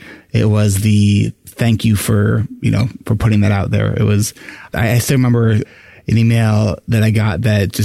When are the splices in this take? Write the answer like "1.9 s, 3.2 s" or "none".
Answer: 4.7 s, 5.7 s